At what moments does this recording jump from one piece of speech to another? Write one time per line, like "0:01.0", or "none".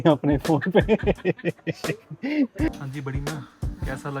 0:02.7